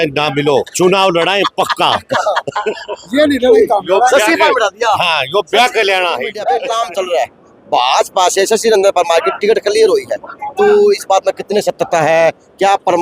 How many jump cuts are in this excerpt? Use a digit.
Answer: 1